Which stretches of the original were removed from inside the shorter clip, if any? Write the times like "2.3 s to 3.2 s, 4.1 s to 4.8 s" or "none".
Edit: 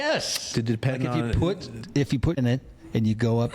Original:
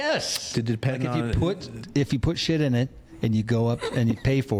2.4 s to 2.7 s